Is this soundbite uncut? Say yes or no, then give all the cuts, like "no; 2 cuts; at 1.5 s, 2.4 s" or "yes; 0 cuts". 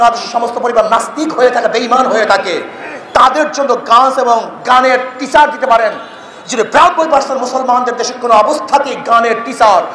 yes; 0 cuts